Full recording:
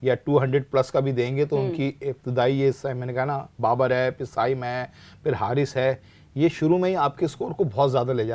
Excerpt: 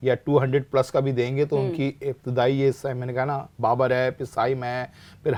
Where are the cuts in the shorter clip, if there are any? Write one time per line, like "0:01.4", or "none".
none

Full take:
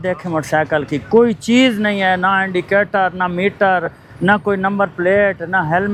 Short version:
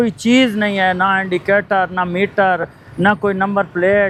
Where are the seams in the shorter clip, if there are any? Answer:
none

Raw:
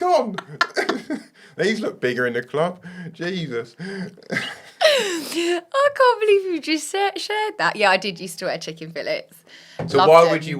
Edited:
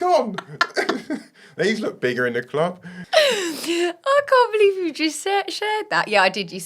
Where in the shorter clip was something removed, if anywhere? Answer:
0:02.9

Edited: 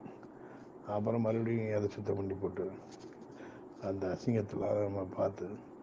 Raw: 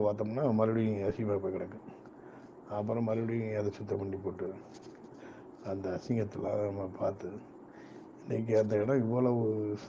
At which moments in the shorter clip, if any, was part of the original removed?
none

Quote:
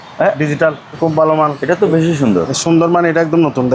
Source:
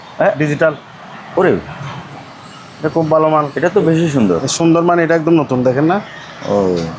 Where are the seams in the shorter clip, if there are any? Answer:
0:01.0

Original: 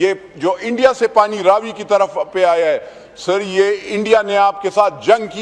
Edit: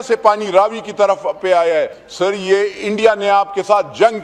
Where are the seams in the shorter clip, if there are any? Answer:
0:02.0

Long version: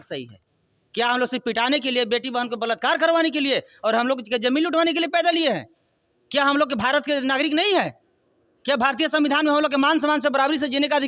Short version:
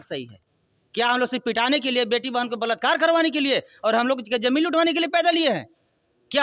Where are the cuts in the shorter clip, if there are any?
none

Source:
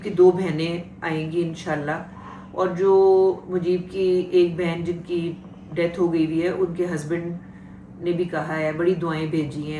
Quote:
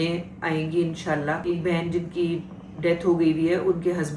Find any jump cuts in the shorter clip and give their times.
0:01.6

